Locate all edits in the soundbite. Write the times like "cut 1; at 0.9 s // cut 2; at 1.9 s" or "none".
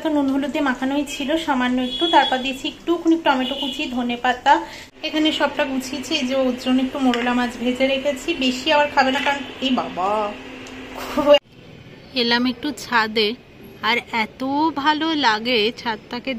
cut 1; at 4.8 s // cut 2; at 11.5 s